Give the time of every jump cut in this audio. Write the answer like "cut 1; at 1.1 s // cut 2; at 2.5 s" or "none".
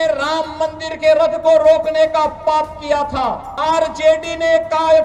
cut 1; at 3.5 s